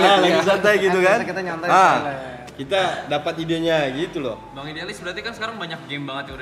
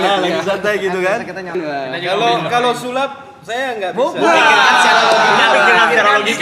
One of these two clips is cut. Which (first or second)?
second